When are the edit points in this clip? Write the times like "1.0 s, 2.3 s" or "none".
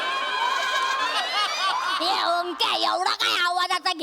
2.0 s